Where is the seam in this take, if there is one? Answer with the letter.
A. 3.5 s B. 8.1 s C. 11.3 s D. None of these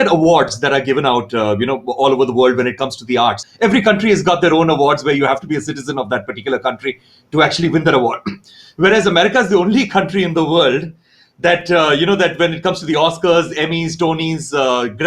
A